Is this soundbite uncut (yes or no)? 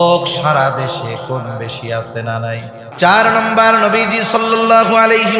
no